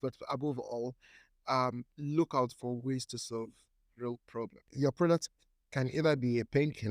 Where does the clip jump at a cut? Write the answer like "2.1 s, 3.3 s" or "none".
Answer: 4.7 s